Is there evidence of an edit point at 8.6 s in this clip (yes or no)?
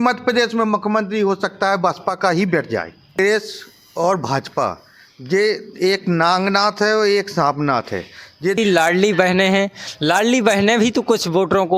yes